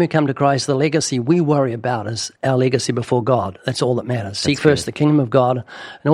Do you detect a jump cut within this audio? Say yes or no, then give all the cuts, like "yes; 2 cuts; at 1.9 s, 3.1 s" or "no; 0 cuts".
yes; 1 cut; at 2.2 s